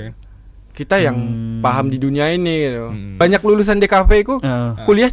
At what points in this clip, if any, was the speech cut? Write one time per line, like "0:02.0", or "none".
0:03.0